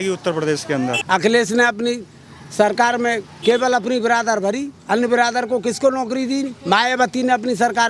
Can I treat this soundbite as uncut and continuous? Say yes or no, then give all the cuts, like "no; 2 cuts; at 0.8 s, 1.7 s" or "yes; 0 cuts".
no; 1 cut; at 1.0 s